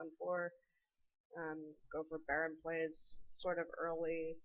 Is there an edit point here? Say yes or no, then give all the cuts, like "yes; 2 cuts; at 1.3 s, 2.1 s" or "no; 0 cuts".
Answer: yes; 1 cut; at 3.1 s